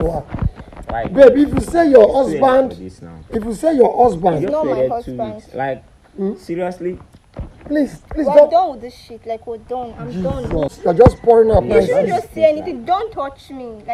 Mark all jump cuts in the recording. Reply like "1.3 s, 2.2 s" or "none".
10.8 s